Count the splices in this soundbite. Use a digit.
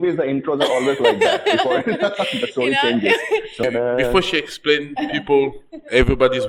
1